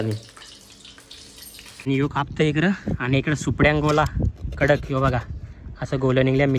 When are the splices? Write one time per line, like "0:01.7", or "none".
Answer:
0:01.9